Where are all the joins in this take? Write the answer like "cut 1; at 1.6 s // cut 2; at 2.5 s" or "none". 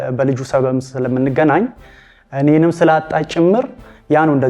none